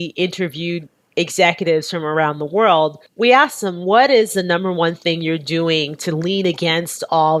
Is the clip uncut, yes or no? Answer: yes